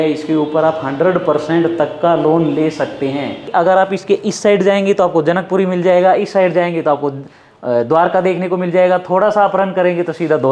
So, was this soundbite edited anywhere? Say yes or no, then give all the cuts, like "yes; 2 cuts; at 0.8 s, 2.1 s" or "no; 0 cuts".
yes; 1 cut; at 3.5 s